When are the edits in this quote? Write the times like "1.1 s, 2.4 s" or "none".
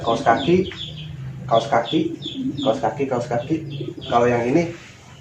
4.1 s